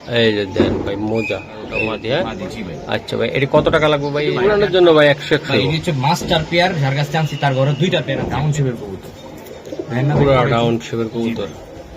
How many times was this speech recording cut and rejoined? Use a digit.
3